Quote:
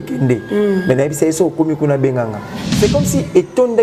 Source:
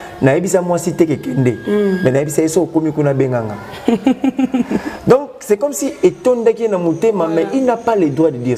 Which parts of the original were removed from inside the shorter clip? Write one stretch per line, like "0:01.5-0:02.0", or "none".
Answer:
0:03.8-0:05.3